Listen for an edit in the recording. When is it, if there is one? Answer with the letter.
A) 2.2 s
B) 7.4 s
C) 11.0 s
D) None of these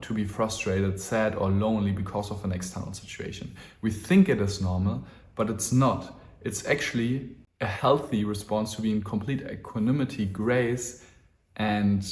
B